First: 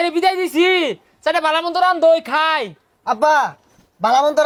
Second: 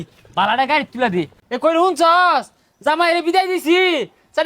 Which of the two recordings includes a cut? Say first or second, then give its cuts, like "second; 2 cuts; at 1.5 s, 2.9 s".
second; 1 cut; at 1.4 s